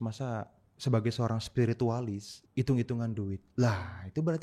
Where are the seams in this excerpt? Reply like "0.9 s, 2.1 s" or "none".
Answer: 2.3 s